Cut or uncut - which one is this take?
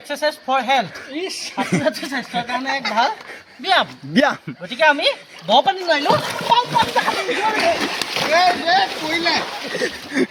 uncut